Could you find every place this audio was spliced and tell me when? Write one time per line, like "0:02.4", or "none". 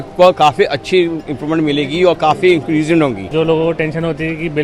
0:03.2